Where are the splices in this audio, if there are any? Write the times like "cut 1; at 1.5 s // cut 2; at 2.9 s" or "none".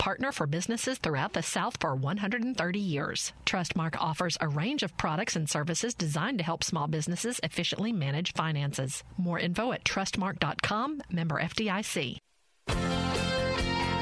cut 1; at 12.5 s

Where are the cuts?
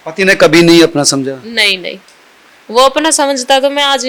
none

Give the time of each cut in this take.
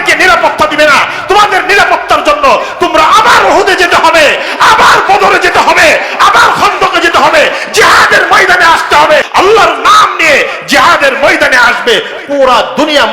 cut 1; at 9.3 s

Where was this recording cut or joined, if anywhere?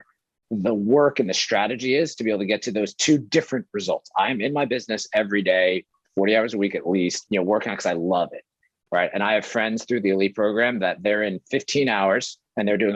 cut 1; at 7.2 s

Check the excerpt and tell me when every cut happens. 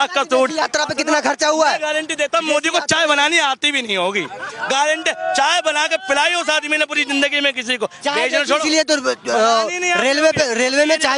none

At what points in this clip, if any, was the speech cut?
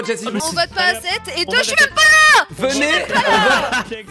none

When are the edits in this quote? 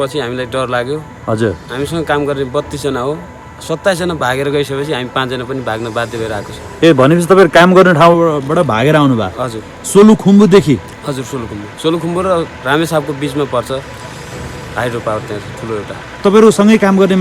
cut 1; at 16.2 s

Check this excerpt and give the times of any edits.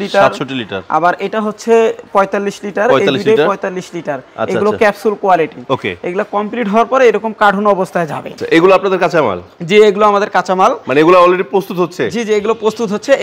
cut 1; at 8.3 s

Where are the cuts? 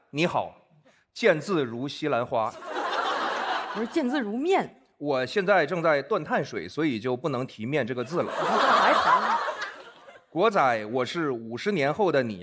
none

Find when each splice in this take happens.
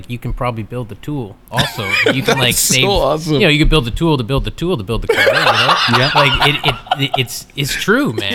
none

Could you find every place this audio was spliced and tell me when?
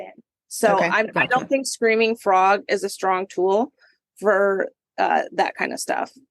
none

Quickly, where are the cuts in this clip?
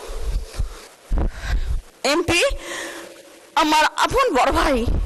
cut 1; at 0.9 s

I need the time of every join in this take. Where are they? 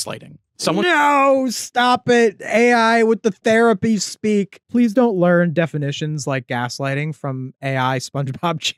none

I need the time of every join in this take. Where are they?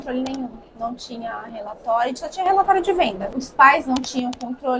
cut 1; at 3.3 s

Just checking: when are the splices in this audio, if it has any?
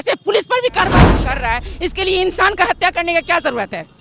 cut 1; at 1.1 s

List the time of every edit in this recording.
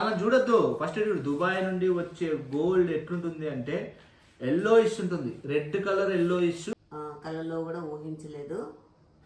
cut 1; at 6.7 s

